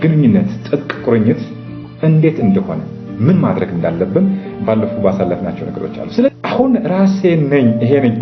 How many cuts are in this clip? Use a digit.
1